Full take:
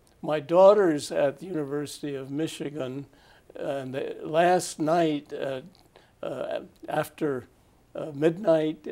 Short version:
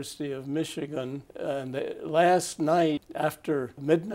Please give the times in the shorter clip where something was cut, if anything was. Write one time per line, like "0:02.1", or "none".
0:01.3
0:03.1